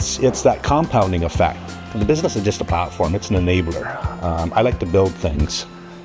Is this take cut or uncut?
uncut